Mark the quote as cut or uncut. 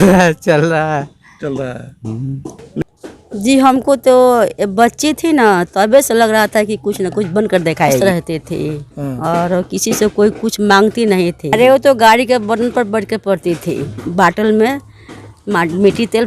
cut